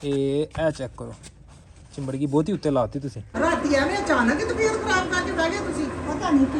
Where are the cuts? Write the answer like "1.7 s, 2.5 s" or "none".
3.2 s